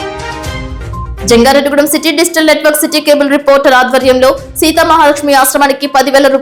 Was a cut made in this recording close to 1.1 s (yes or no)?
no